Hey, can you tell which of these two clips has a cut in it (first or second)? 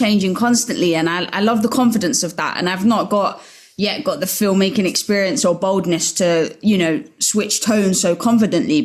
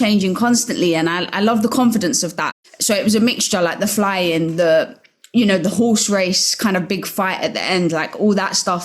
second